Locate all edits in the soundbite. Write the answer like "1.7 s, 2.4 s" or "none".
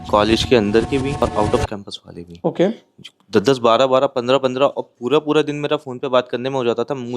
1.2 s